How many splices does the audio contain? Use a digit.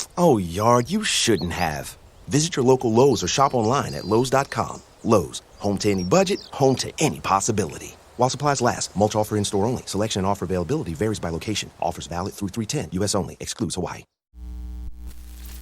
1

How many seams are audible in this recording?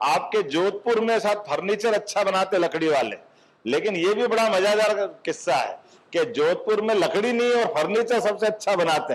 0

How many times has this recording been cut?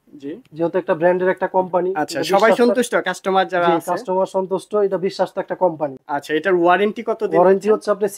0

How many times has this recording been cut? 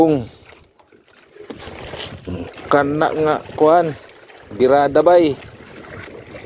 1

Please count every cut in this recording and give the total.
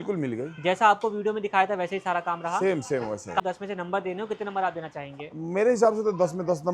1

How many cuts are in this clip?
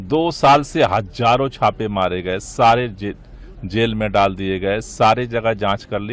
0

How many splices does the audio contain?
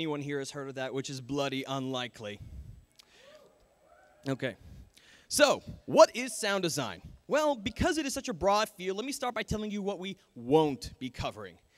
0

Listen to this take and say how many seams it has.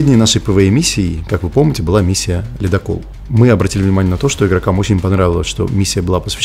1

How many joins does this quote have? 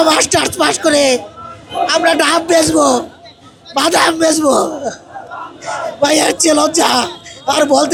0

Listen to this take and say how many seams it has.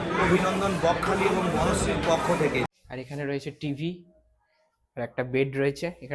1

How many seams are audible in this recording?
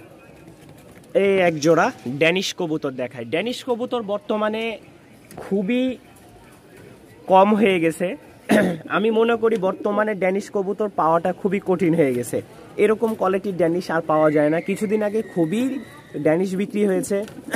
0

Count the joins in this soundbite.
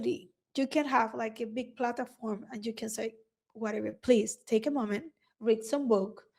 0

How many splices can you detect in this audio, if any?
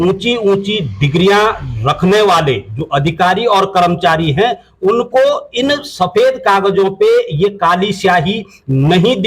0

